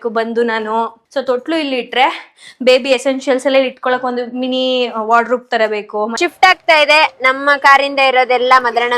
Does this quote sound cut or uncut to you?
cut